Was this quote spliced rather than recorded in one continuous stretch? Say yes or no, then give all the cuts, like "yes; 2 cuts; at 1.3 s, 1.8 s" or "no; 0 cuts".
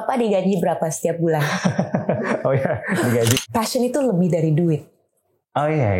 yes; 1 cut; at 3.4 s